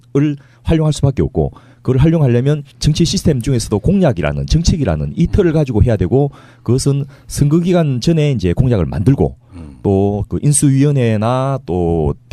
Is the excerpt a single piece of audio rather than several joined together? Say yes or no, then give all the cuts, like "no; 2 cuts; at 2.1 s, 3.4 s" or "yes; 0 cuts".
yes; 0 cuts